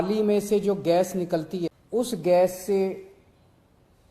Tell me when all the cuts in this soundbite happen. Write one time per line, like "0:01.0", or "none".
0:01.8